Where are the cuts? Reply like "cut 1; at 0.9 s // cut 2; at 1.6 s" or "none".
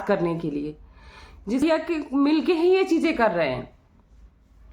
cut 1; at 1.6 s